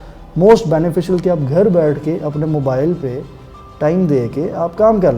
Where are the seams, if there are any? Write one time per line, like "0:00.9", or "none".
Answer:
none